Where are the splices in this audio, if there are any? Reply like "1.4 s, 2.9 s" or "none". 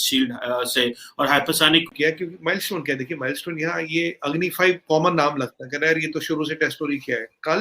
1.9 s

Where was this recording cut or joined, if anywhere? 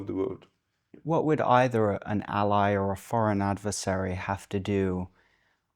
1.0 s

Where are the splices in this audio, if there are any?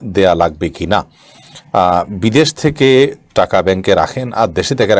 none

